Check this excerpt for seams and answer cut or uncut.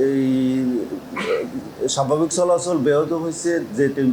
uncut